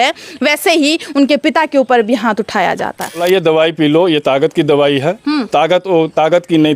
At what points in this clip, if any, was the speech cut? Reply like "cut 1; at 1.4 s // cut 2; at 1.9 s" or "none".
cut 1; at 3.2 s